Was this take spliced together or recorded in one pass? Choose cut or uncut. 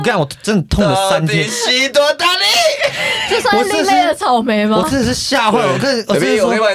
uncut